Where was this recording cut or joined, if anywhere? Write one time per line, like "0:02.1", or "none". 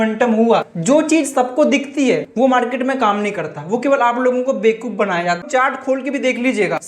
0:05.4